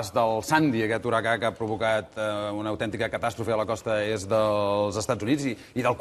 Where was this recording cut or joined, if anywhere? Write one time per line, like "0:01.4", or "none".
0:02.6